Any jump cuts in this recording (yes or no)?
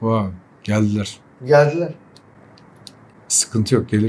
no